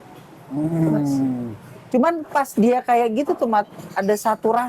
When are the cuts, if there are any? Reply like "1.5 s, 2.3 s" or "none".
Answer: none